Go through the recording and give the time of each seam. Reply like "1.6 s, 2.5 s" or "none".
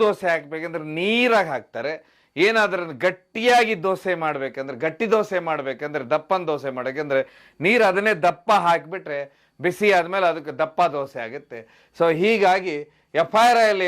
none